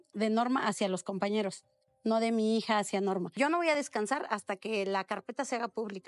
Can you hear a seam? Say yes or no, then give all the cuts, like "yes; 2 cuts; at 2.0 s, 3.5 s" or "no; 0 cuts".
no; 0 cuts